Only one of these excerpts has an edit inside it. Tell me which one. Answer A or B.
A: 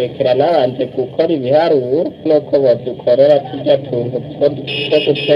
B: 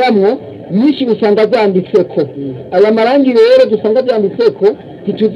A